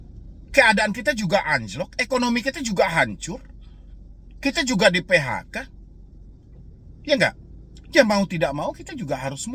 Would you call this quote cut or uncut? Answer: uncut